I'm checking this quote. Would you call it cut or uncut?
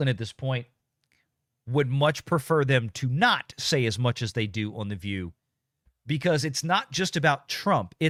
uncut